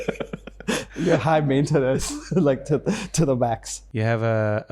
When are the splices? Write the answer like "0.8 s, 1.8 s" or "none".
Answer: 3.8 s

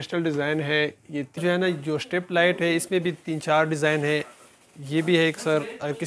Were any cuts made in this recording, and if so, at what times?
1.4 s

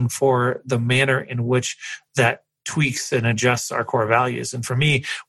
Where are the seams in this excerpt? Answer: none

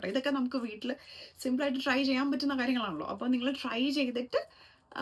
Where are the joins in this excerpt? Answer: none

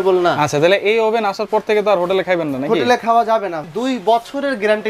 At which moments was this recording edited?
3.6 s

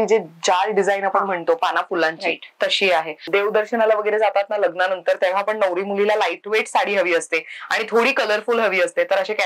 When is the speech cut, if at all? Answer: 3.2 s

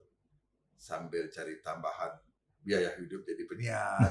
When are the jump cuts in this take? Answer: none

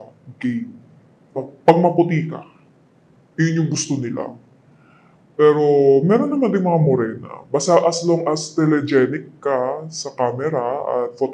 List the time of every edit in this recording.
1.4 s

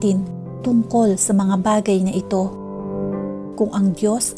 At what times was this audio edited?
none

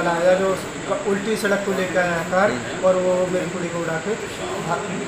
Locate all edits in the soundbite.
none

